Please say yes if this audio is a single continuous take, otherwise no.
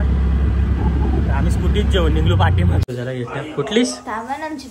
no